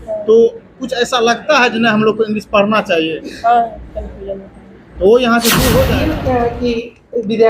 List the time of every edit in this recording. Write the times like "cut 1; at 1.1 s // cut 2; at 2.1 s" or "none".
cut 1; at 6.1 s